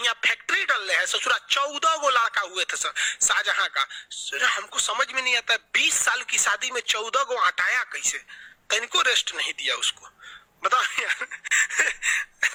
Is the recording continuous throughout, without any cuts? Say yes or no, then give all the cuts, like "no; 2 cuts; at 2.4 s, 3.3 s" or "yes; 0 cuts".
yes; 0 cuts